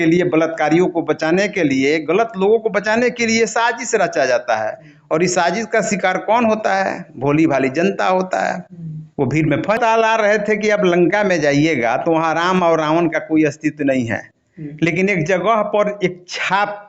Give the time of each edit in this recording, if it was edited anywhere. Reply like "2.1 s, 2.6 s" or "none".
9.8 s